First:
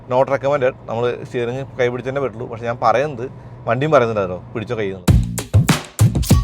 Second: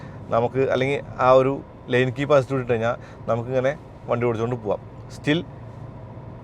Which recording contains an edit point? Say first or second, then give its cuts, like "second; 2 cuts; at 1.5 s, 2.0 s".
first; 1 cut; at 5.0 s